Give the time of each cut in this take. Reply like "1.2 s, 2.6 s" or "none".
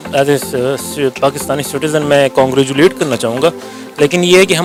none